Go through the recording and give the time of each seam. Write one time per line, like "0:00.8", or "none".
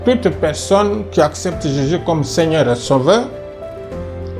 none